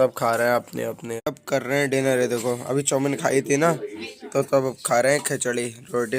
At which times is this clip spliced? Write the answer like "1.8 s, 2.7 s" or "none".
1.1 s